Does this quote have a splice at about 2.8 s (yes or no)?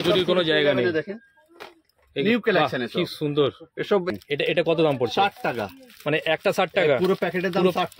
no